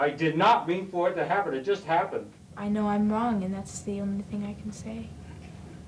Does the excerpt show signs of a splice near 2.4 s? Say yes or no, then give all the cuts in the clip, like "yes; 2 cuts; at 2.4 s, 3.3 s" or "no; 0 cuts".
yes; 1 cut; at 2.4 s